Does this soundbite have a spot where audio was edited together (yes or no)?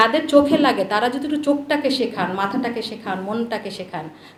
no